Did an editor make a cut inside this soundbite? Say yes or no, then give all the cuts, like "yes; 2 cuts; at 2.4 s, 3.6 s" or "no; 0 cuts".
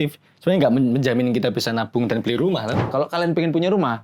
yes; 1 cut; at 2.8 s